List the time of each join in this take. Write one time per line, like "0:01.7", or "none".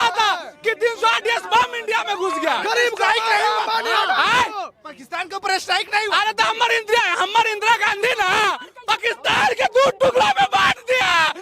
none